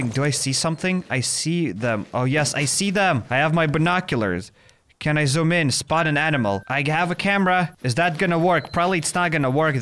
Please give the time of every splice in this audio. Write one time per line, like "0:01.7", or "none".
0:03.2
0:06.6
0:07.8